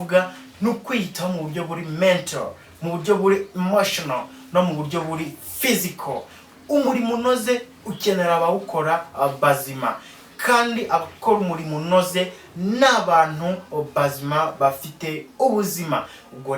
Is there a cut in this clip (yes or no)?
yes